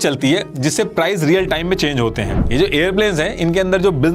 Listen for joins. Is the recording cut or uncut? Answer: cut